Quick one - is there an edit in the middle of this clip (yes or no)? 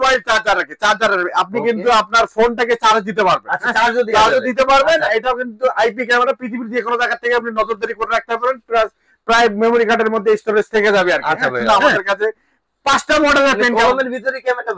yes